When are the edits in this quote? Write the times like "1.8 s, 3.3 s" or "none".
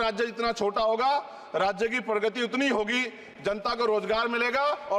none